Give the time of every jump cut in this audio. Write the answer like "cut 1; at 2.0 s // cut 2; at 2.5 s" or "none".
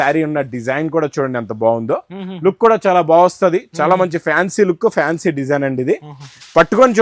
none